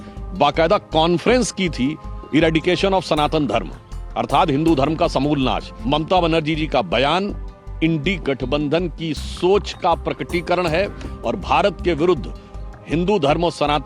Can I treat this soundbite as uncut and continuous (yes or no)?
no